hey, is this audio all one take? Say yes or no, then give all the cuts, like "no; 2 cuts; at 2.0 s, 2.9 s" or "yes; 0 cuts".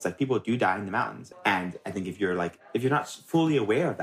no; 1 cut; at 1.2 s